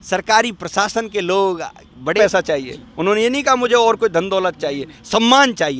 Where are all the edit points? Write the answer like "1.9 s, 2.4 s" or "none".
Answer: 2.2 s